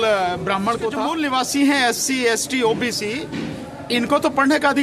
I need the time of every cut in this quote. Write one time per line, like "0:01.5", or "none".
0:01.0